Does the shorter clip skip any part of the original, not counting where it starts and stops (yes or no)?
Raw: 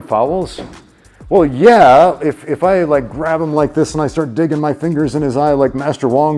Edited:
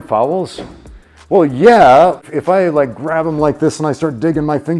yes